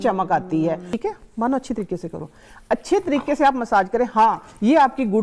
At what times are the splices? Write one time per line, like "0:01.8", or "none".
0:00.9